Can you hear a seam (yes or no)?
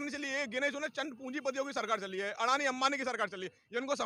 no